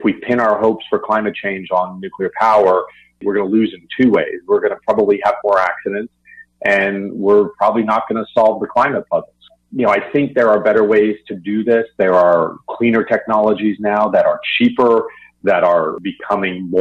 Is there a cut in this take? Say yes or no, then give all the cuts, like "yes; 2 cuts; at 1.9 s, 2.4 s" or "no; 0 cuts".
no; 0 cuts